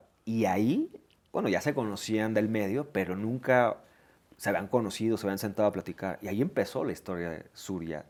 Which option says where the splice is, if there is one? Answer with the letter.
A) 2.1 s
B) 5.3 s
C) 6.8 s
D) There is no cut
D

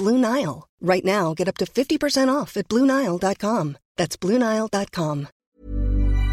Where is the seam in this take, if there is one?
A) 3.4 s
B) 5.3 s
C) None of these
B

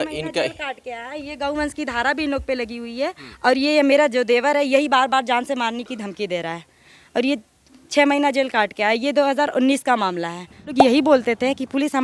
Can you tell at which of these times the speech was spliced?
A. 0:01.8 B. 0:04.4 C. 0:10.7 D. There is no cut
C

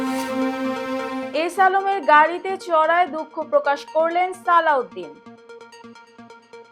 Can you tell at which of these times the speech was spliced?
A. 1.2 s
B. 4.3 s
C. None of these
A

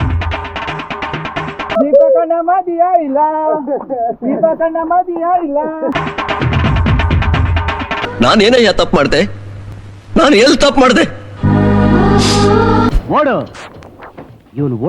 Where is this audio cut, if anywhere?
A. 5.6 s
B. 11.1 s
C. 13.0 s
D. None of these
C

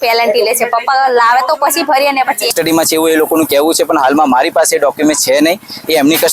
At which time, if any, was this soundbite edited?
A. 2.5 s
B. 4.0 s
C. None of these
A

